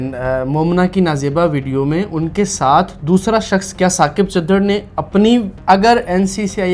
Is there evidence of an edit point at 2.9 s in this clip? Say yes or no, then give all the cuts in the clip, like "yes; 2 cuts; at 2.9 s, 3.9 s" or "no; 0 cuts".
no; 1 cut; at 5.5 s